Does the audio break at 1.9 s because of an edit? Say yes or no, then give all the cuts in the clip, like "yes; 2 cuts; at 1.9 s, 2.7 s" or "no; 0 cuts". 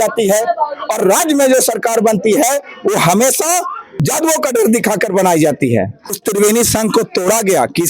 no; 2 cuts; at 3.8 s, 6.1 s